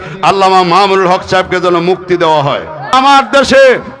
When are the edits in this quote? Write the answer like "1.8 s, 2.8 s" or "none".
3.0 s

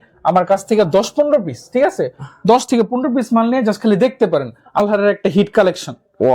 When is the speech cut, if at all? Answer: 4.8 s

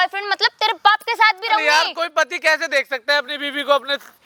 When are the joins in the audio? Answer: none

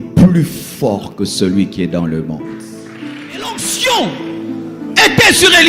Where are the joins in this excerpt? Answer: 3.7 s

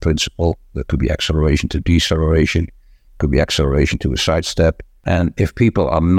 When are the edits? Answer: 5.0 s

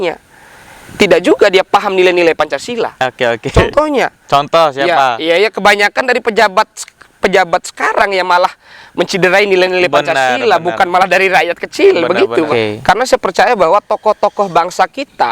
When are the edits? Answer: 12.5 s

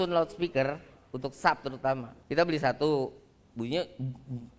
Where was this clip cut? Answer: none

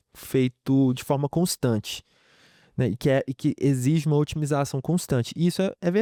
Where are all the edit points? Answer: none

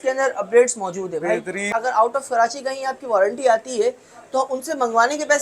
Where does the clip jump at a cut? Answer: 1.7 s

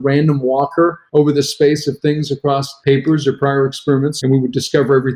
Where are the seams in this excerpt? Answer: 1.0 s, 2.7 s, 4.1 s

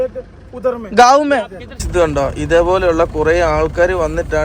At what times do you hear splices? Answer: 1.7 s

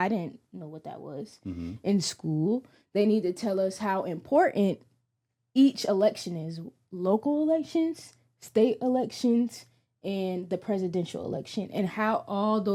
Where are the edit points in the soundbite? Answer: none

